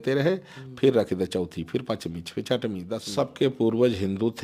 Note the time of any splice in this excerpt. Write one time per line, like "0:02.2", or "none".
0:03.1